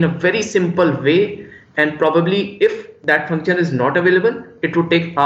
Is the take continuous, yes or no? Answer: yes